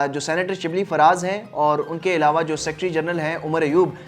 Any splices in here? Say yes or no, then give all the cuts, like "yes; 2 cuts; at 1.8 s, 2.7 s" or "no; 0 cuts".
no; 0 cuts